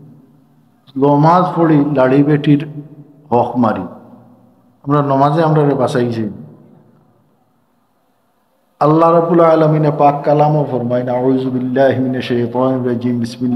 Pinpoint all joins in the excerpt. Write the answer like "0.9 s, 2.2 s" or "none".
none